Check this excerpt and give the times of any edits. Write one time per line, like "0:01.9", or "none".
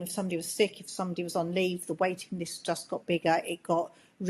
none